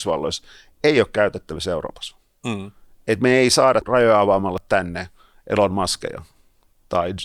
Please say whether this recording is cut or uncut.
uncut